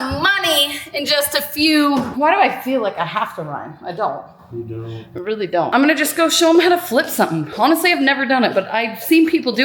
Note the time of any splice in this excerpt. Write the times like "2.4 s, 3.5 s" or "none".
2.1 s, 5.7 s